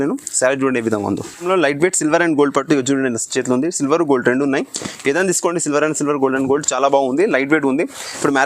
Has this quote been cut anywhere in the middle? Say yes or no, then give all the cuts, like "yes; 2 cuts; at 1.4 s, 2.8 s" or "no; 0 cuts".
yes; 1 cut; at 1.4 s